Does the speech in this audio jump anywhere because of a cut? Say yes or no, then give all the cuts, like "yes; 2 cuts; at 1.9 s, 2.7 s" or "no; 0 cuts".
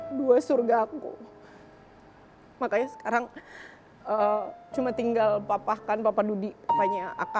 no; 0 cuts